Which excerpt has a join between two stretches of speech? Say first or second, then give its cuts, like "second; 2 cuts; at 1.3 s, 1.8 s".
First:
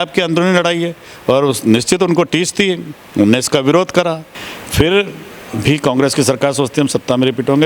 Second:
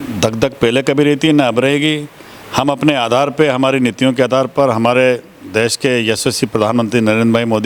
first; 1 cut; at 4.3 s